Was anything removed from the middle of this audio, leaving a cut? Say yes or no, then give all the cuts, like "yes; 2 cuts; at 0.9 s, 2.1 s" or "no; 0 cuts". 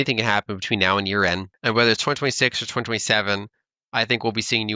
yes; 1 cut; at 1.5 s